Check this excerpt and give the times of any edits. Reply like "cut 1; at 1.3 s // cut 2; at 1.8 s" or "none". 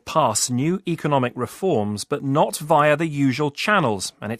none